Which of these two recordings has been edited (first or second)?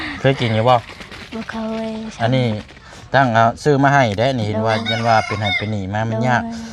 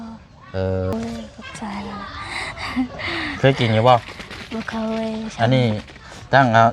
second